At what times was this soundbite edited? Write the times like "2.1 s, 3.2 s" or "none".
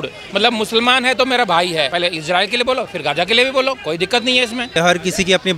1.9 s, 4.8 s